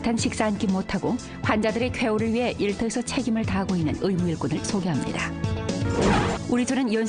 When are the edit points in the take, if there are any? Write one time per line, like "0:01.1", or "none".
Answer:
none